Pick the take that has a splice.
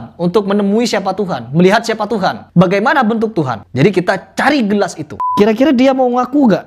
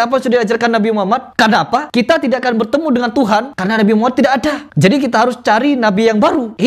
first; 1 cut; at 5.2 s

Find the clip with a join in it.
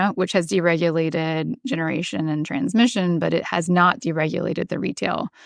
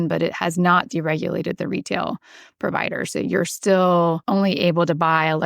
second; 1 cut; at 4.2 s

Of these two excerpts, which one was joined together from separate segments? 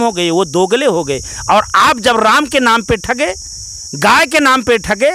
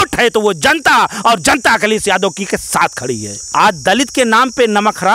second; 1 cut; at 3.4 s

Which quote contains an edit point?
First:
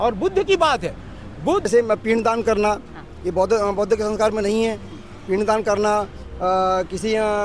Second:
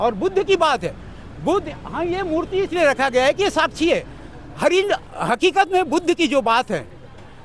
first; 1 cut; at 1.7 s

